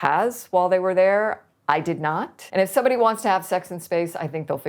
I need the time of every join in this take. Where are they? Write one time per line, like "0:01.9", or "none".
0:02.3